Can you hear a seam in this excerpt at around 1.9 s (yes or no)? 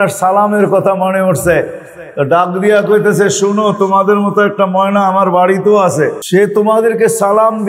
no